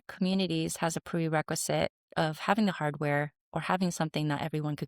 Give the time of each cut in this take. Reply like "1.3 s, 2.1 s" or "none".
none